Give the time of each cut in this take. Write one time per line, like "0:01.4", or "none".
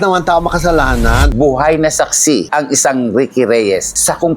0:01.3